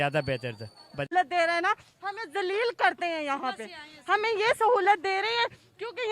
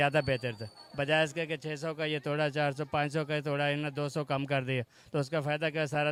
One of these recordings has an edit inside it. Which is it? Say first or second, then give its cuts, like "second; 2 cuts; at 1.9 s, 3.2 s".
first; 1 cut; at 1.1 s